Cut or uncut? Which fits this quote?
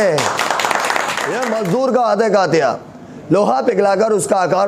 cut